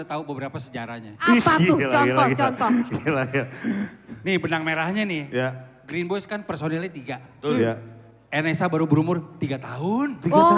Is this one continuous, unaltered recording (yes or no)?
yes